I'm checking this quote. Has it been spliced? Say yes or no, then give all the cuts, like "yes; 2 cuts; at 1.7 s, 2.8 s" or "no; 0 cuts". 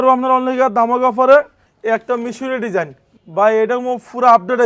yes; 1 cut; at 1.6 s